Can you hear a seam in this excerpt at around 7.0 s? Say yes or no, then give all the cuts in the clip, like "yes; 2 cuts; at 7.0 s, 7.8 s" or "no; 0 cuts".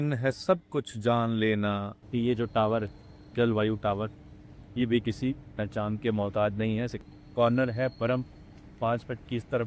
yes; 2 cuts; at 2.0 s, 7.0 s